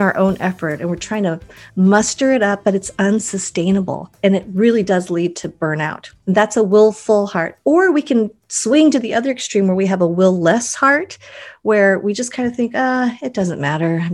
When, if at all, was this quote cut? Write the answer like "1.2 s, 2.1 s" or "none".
4.0 s, 6.1 s